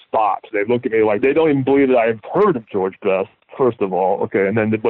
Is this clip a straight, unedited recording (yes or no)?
no